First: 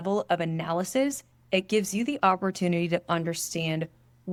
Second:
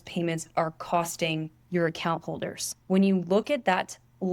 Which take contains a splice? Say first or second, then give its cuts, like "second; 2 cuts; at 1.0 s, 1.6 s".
second; 2 cuts; at 1.6 s, 2.7 s